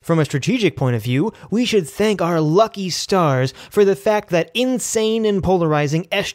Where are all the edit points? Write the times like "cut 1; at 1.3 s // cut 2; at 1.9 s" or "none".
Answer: none